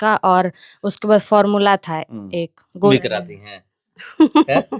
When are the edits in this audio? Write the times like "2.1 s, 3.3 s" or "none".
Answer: 2.9 s